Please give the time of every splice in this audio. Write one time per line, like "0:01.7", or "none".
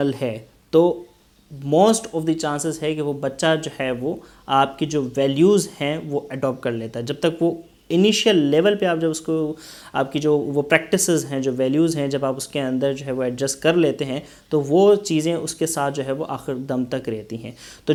none